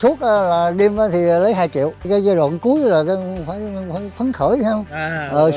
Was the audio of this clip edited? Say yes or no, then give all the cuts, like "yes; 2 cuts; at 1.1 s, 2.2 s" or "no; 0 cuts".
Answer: yes; 1 cut; at 2.1 s